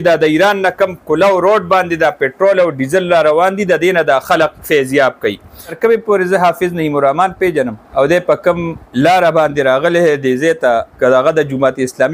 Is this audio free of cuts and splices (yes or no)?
no